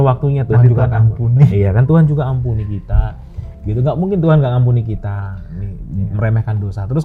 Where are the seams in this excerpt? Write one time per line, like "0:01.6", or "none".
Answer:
none